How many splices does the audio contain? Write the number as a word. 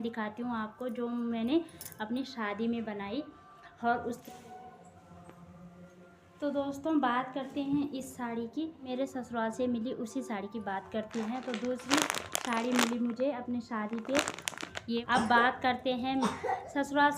three